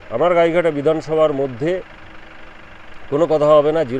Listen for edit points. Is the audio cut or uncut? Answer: uncut